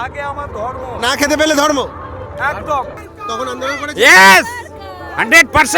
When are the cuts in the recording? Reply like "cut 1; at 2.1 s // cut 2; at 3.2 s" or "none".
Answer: cut 1; at 3.1 s